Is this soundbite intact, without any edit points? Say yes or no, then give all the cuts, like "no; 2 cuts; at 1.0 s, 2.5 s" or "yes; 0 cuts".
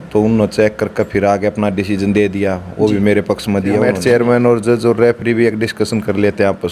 no; 1 cut; at 3.9 s